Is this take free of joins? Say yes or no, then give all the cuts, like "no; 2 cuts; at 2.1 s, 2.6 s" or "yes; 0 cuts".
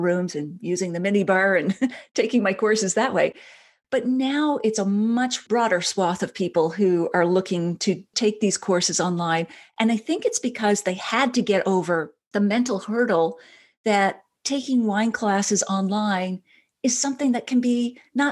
yes; 0 cuts